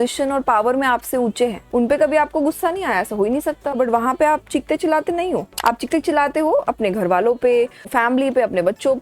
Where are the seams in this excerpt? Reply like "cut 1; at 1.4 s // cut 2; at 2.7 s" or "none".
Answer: cut 1; at 1.6 s // cut 2; at 3.8 s // cut 3; at 5.5 s // cut 4; at 7.9 s